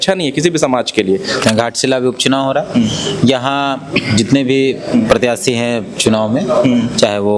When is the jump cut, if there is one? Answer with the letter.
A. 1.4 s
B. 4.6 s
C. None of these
A